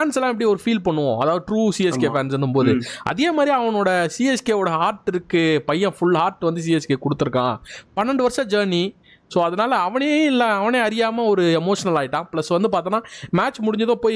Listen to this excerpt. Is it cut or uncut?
uncut